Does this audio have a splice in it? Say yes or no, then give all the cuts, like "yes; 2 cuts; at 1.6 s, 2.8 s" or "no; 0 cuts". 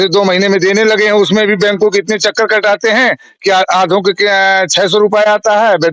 no; 0 cuts